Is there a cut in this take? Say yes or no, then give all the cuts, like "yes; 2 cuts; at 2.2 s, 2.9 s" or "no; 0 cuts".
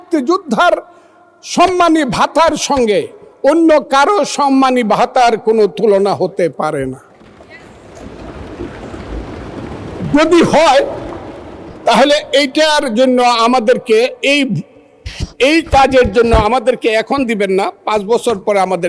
no; 0 cuts